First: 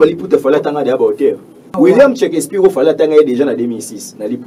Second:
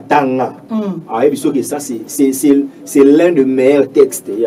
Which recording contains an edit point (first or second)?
first